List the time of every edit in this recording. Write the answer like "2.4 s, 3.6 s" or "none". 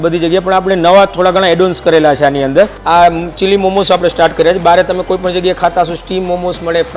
2.8 s